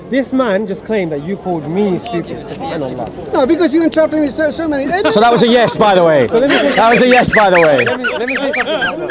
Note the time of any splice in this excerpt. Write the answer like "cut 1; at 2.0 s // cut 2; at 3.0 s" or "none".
none